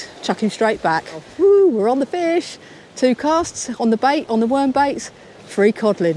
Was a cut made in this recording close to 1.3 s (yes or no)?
yes